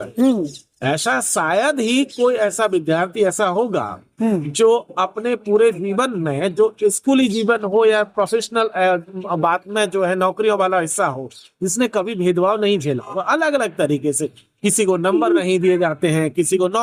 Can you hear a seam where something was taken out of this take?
no; 0 cuts

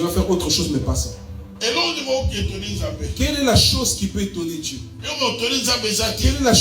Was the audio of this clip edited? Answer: no; 0 cuts

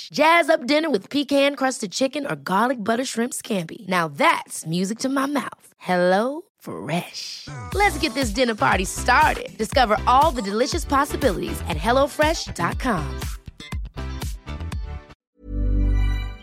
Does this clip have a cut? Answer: yes; 1 cut; at 15.1 s

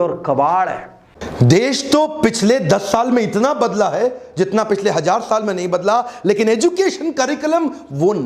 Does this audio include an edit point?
yes; 1 cut; at 1.1 s

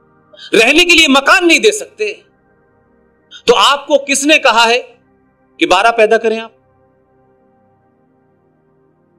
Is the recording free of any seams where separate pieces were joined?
yes; 0 cuts

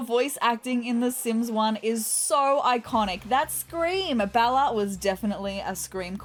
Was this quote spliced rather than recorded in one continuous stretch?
no; 0 cuts

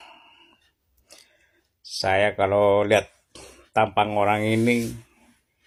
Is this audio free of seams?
yes; 0 cuts

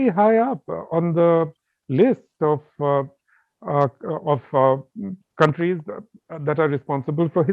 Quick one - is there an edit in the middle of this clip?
no; 0 cuts

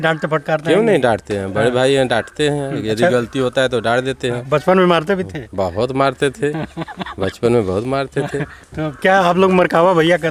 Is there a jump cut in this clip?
no; 0 cuts

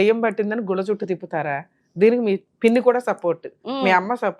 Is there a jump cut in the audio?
yes; 1 cut; at 2.5 s

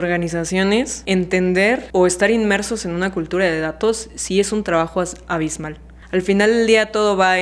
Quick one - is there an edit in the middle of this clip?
yes; 3 cuts; at 1.0 s, 1.8 s, 5.9 s

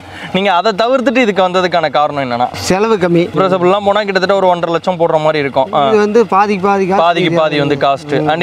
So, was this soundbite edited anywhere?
yes; 1 cut; at 3.3 s

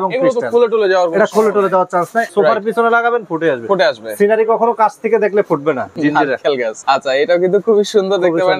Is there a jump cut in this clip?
yes; 3 cuts; at 2.3 s, 5.9 s, 6.8 s

